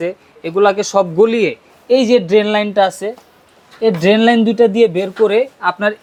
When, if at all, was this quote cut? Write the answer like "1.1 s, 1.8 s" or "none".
none